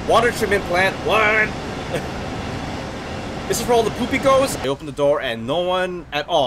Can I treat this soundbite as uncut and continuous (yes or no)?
no